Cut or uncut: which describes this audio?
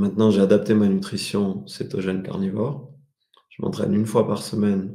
uncut